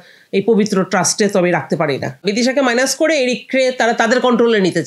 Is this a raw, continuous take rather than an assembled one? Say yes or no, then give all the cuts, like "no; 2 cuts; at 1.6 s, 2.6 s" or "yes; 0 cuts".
no; 1 cut; at 2.2 s